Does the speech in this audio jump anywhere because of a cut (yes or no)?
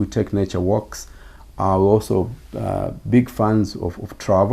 no